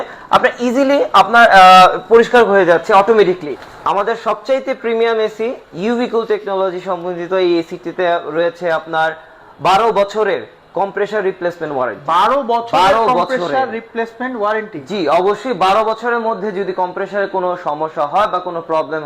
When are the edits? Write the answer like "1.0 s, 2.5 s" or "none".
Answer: 3.5 s